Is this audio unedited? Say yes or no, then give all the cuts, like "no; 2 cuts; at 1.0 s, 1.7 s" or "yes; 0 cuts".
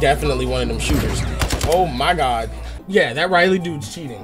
no; 1 cut; at 2.8 s